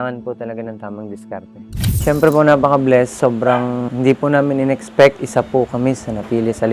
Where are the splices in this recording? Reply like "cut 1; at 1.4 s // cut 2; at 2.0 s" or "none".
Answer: cut 1; at 1.9 s